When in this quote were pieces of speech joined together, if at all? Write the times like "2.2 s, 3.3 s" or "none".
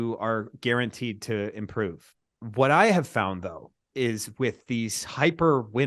2.1 s